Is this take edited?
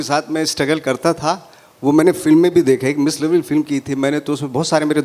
no; 0 cuts

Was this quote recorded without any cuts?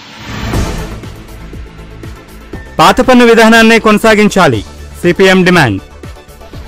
yes; 0 cuts

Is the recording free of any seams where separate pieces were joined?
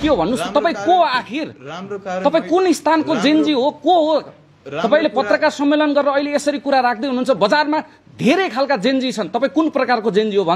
yes; 0 cuts

